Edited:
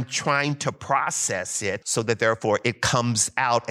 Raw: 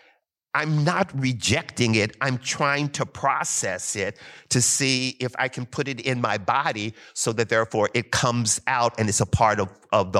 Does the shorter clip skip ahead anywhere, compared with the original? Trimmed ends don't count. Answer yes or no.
yes